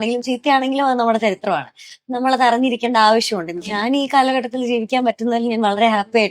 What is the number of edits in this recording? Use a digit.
1